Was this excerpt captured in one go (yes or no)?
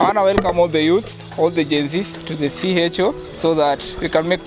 yes